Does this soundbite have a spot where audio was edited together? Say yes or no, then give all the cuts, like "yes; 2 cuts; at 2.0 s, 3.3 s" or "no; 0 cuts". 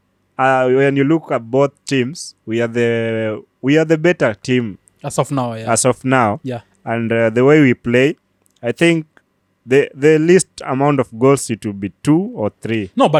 no; 0 cuts